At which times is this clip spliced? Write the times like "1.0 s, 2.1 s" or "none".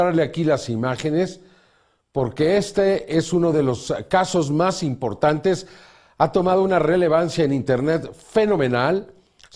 4.5 s